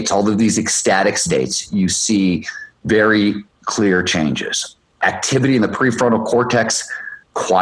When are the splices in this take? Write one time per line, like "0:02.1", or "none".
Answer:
none